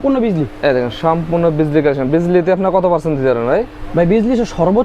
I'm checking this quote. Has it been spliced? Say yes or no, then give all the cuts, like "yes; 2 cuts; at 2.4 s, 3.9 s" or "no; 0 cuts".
no; 0 cuts